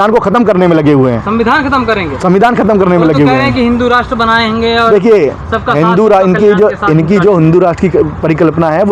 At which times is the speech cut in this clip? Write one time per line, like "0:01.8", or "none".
none